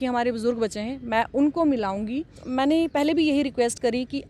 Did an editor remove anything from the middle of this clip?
yes; 1 cut; at 2.4 s

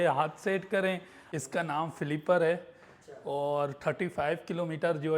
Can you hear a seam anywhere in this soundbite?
yes; 1 cut; at 1.3 s

